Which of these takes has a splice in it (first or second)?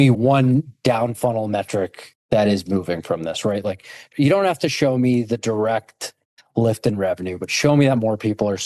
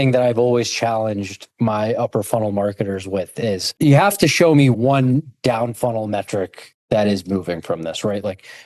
second